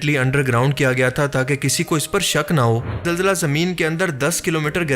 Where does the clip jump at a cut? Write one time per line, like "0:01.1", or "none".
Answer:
0:03.0